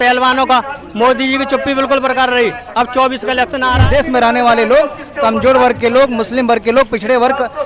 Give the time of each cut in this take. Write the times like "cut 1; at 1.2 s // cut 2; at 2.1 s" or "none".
cut 1; at 3.8 s